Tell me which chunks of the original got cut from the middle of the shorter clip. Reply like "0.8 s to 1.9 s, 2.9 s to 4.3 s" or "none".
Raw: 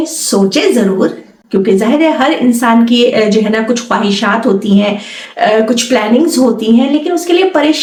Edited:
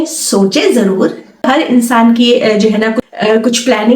1.4 s to 2.2 s, 3.8 s to 5.3 s